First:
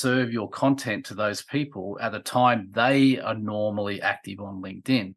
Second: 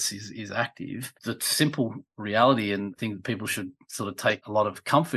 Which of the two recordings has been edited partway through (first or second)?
second